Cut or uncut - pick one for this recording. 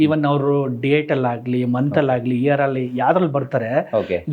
uncut